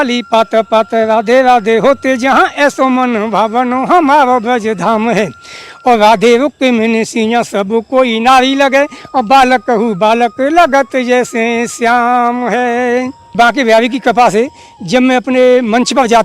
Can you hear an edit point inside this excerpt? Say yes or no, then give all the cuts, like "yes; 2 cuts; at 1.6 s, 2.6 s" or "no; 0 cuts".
yes; 1 cut; at 13.3 s